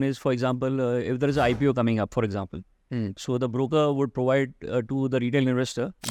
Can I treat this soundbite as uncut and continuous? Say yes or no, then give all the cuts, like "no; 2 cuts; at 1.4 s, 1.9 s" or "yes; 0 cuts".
yes; 0 cuts